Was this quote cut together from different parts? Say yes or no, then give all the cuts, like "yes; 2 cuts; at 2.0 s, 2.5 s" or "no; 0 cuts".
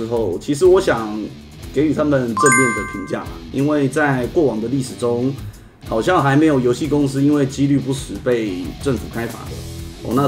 no; 0 cuts